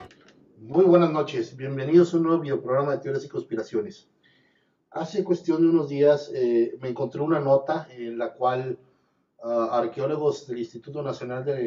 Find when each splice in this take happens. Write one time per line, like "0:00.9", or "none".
0:01.5